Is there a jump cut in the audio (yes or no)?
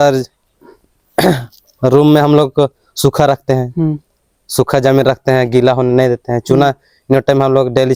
no